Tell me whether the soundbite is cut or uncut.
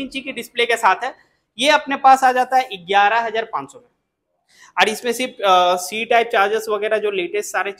uncut